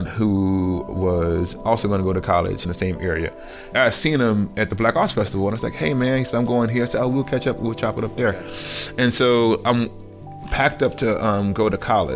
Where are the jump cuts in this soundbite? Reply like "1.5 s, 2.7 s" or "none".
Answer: 3.7 s